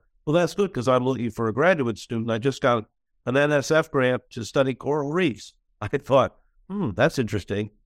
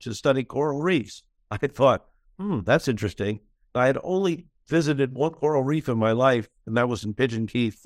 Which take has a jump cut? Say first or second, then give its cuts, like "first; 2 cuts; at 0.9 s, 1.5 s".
second; 1 cut; at 4.5 s